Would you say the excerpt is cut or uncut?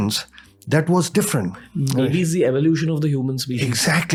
uncut